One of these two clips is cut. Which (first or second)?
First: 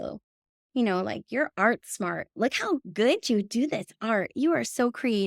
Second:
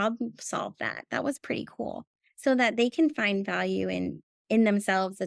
first